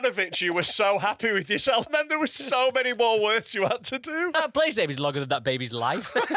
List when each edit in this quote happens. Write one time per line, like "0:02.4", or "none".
0:01.9
0:04.3